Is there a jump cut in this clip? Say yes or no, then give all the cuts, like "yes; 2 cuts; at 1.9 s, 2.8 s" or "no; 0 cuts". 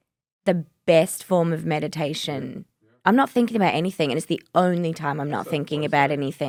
no; 0 cuts